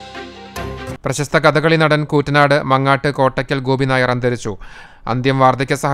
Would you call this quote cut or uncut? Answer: cut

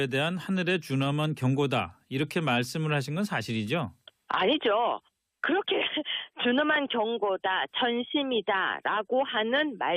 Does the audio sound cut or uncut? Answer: cut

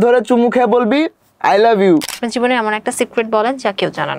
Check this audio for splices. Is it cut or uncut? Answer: cut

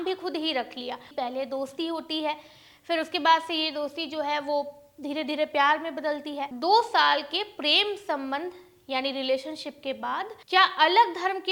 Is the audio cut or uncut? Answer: cut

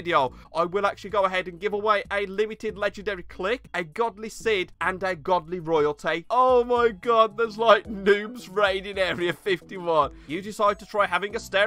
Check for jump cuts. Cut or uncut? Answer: cut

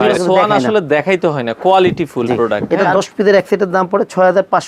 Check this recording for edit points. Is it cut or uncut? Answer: cut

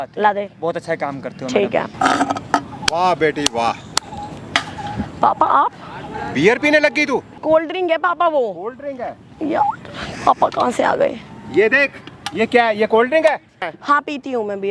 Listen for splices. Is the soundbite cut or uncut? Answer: cut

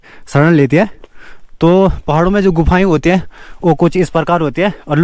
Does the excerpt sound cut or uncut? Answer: uncut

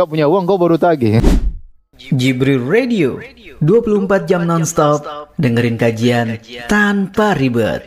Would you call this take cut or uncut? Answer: cut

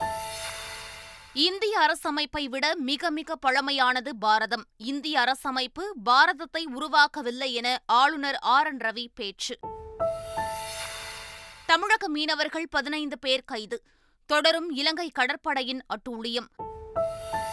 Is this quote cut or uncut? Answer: cut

